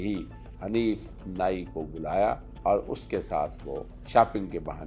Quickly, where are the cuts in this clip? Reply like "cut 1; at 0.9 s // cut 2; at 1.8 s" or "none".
cut 1; at 2.5 s // cut 2; at 3.9 s